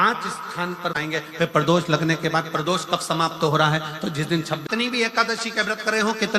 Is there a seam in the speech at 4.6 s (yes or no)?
yes